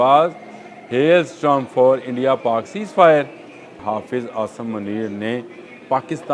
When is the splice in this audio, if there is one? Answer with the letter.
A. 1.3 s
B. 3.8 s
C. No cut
B